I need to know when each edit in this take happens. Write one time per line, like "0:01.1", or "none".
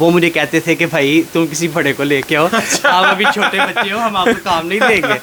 none